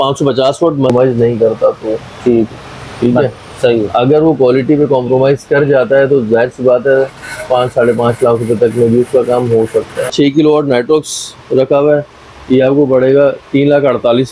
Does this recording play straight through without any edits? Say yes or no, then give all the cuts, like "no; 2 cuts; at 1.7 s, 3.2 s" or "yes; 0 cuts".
no; 2 cuts; at 0.9 s, 10.1 s